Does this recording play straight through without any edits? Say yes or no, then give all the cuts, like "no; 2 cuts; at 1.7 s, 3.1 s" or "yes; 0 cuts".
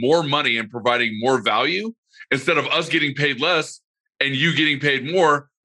yes; 0 cuts